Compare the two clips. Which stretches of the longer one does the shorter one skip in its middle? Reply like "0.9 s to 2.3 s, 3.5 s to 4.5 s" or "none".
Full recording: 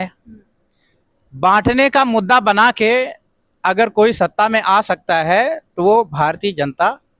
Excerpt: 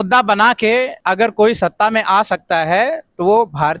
3.2 s to 3.6 s